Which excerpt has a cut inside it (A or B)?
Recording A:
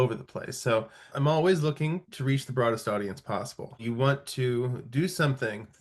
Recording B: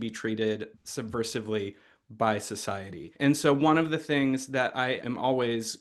A